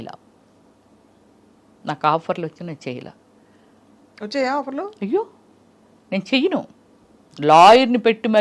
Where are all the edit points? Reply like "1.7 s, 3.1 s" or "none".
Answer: none